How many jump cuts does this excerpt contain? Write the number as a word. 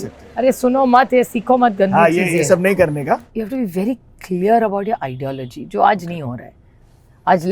one